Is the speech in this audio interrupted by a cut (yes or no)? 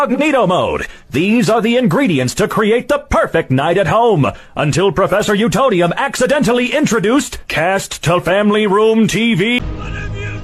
no